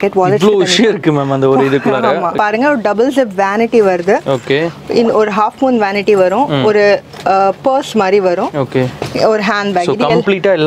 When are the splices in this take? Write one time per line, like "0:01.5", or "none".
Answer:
0:02.4